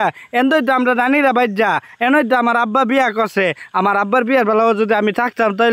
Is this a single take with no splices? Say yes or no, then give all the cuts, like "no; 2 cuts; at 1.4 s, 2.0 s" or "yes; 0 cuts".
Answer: yes; 0 cuts